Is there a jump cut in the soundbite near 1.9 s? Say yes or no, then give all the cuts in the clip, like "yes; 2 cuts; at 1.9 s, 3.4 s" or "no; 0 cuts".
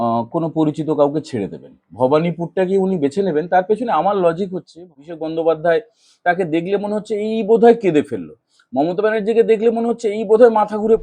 no; 1 cut; at 5.1 s